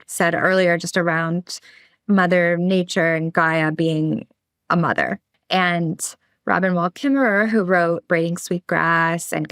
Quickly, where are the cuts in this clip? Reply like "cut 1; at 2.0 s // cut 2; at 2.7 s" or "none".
cut 1; at 5.3 s